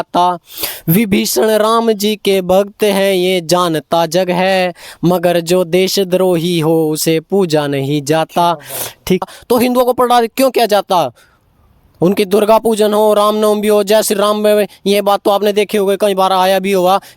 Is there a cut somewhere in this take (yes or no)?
yes